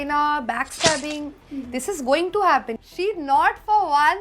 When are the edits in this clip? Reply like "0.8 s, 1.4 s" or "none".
2.7 s